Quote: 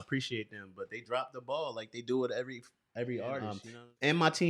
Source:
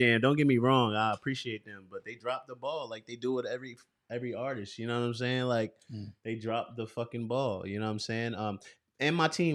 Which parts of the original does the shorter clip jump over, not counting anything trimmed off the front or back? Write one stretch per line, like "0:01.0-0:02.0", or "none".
0:04.7-0:08.5

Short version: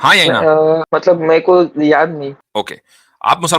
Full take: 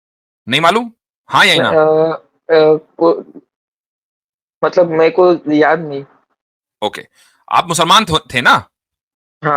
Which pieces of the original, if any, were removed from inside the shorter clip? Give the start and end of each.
0:02.2-0:04.6
0:06.1-0:06.7

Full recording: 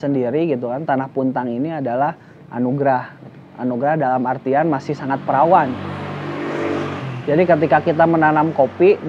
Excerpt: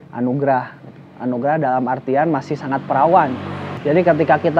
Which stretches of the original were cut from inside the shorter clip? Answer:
0:06.0-0:07.1

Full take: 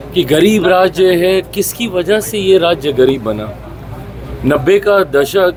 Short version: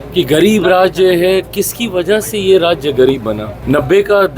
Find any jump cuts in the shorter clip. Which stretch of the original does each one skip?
0:03.5-0:04.3

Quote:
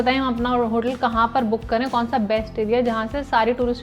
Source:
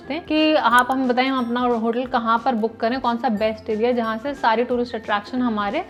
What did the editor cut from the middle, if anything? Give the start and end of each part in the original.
none

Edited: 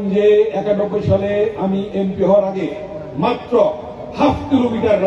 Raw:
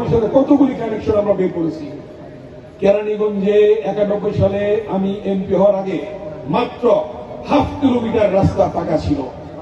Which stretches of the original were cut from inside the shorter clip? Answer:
none

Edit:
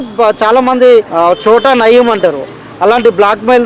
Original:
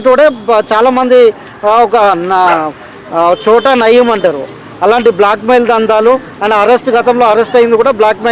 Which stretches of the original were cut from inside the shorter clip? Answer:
0:01.4-0:03.1

